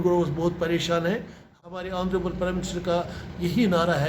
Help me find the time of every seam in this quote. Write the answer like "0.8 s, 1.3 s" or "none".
1.6 s